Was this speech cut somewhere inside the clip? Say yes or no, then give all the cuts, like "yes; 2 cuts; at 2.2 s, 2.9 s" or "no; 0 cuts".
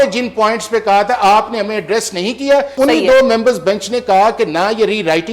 yes; 1 cut; at 2.7 s